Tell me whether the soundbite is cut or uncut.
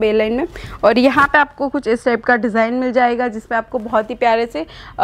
uncut